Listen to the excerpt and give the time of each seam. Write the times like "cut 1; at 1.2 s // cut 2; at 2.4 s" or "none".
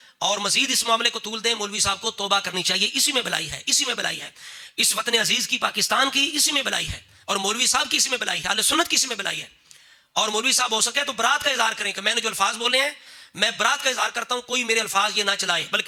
none